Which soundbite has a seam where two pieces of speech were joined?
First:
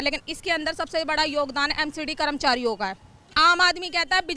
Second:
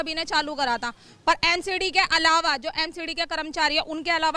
first; 1 cut; at 3.3 s

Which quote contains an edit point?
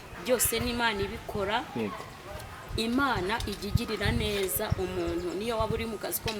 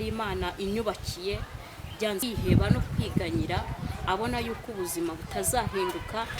second; 1 cut; at 2.2 s

